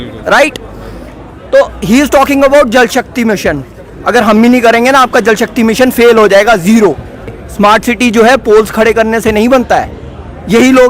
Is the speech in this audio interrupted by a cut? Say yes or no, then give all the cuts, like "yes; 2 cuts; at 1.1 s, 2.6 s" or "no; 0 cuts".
yes; 1 cut; at 7.4 s